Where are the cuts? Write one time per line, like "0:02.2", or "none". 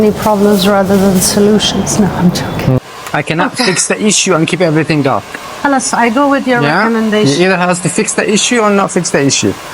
0:02.8